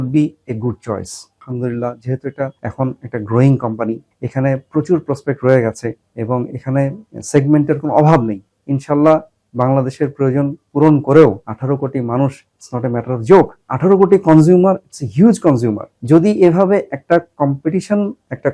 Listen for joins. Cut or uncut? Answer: cut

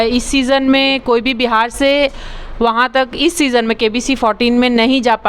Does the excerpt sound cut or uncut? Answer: uncut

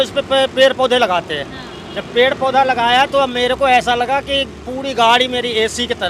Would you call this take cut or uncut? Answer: uncut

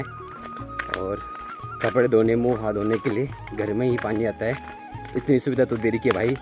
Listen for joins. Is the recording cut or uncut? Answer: uncut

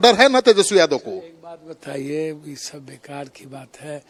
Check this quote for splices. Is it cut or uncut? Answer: uncut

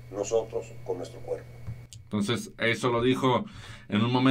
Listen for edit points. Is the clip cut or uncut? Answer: uncut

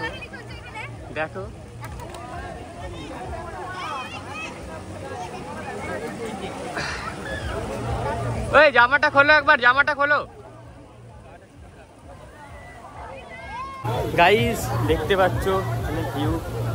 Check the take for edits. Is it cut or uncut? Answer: uncut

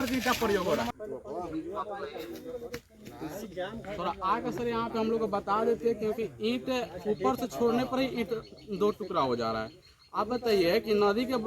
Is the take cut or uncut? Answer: cut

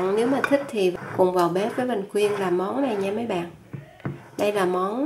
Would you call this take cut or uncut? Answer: cut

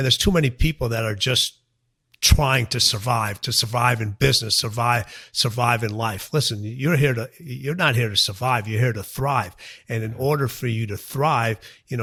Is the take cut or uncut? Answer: uncut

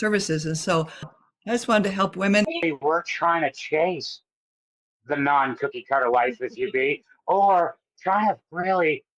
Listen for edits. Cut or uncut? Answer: cut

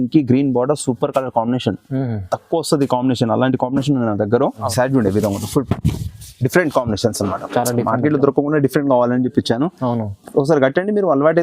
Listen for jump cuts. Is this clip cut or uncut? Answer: cut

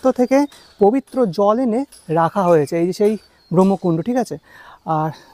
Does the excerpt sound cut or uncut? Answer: uncut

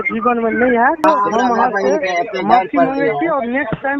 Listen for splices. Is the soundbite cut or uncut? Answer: cut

